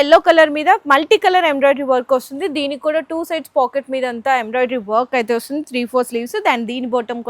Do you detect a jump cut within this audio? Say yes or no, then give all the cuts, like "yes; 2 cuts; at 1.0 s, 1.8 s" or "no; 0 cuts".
no; 0 cuts